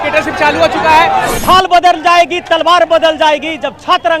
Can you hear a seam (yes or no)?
yes